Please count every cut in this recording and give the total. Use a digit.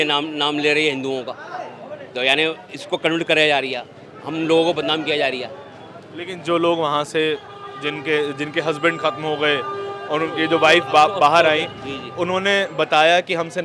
0